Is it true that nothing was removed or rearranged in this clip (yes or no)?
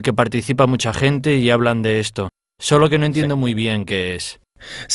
no